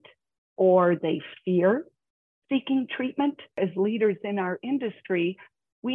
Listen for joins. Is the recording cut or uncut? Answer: cut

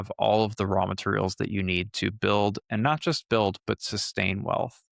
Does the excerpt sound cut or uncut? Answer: uncut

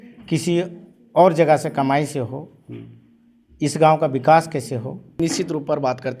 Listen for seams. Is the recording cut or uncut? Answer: cut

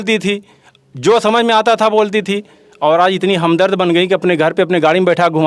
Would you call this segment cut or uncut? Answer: uncut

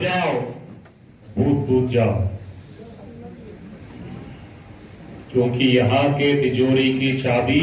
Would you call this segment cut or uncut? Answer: uncut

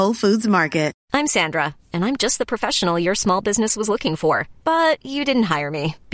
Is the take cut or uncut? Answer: cut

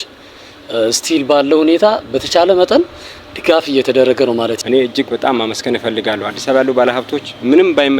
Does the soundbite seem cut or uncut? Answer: cut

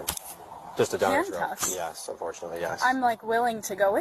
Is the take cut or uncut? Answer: uncut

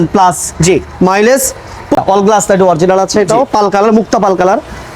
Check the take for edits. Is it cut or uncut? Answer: cut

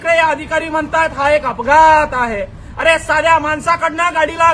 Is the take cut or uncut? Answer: uncut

